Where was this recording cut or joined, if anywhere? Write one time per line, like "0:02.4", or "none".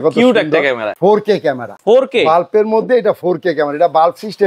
0:01.3